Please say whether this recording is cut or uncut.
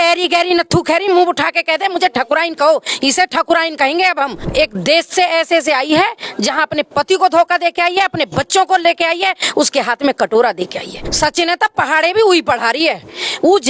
cut